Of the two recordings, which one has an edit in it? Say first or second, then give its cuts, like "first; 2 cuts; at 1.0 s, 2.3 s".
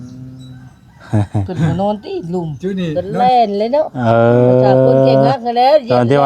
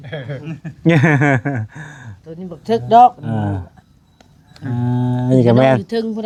first; 1 cut; at 2.9 s